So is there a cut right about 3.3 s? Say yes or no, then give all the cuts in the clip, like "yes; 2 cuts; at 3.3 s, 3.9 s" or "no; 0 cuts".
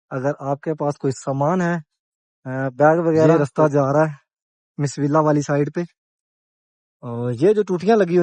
yes; 1 cut; at 3.3 s